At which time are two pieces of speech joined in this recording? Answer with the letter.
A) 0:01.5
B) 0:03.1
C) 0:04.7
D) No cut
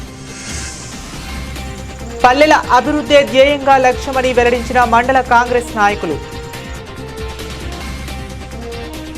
A